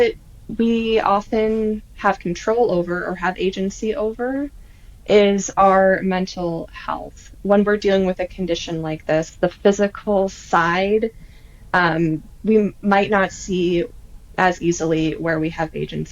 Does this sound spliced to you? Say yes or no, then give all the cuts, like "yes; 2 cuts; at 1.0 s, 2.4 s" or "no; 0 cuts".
no; 0 cuts